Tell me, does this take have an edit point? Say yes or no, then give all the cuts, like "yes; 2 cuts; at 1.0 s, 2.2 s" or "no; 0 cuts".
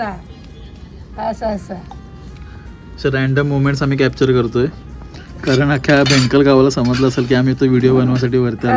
no; 0 cuts